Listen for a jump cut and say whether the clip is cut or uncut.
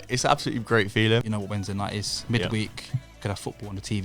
cut